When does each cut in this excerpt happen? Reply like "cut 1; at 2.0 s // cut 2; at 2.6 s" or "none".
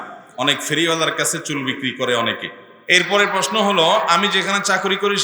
cut 1; at 2.7 s